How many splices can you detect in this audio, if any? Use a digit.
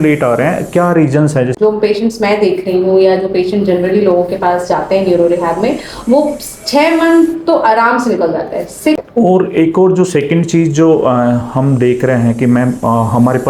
2